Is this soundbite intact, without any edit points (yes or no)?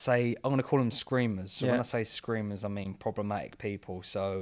yes